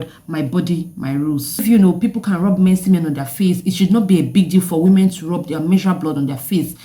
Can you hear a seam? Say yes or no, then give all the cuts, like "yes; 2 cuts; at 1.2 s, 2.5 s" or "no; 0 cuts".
yes; 1 cut; at 1.5 s